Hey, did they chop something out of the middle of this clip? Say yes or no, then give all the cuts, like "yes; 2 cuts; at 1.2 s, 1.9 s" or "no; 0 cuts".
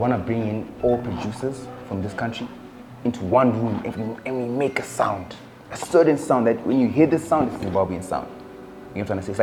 no; 0 cuts